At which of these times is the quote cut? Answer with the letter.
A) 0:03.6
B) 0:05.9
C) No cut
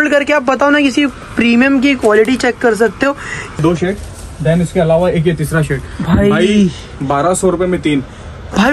A